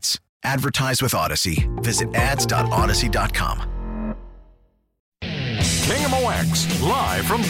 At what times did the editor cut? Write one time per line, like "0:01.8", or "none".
0:04.9